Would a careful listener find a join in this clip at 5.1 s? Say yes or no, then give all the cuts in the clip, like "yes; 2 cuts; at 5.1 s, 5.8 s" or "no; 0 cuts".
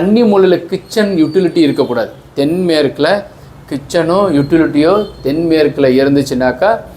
no; 0 cuts